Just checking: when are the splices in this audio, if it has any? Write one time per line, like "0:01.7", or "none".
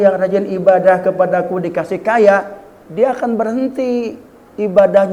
none